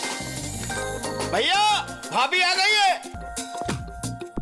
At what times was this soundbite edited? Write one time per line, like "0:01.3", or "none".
0:03.2